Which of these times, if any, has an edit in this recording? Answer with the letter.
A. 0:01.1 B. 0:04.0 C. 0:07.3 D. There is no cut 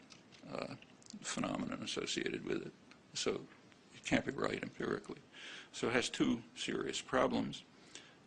D